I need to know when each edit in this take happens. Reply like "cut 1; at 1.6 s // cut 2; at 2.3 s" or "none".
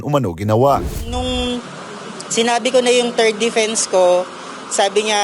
cut 1; at 0.9 s